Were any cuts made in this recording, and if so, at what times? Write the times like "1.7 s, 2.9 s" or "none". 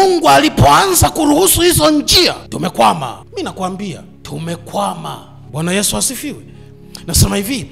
2.5 s, 3.2 s, 4.1 s, 5.3 s